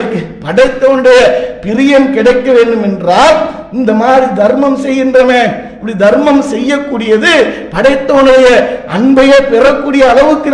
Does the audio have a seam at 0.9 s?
no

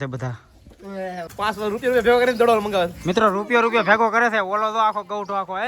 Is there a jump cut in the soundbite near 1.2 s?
yes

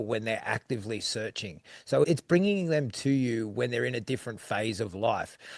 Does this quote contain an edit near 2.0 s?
yes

